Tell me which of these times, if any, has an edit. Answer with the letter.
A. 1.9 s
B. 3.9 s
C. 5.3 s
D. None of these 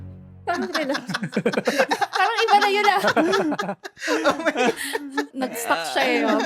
C